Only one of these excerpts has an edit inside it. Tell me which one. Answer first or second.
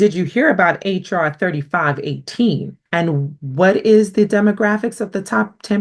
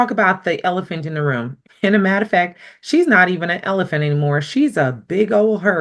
first